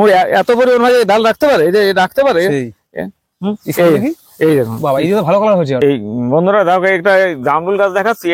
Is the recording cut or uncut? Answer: cut